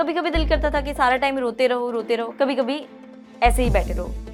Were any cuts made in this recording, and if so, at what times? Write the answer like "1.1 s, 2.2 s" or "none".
none